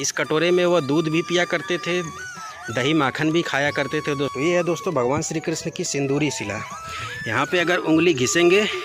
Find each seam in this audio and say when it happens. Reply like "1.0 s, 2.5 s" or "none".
4.3 s